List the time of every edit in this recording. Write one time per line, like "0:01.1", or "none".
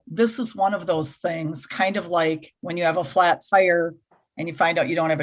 0:02.6